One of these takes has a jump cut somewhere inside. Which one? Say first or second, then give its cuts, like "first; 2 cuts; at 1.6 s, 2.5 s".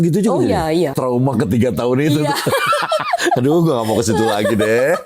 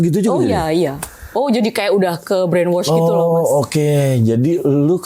first; 1 cut; at 1.0 s